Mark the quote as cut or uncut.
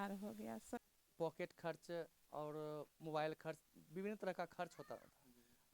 cut